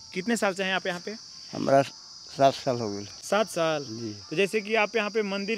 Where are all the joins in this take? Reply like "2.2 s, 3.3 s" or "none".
none